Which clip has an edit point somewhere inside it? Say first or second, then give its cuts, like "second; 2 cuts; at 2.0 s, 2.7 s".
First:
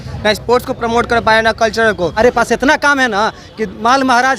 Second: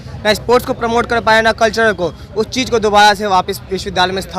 first; 1 cut; at 2.1 s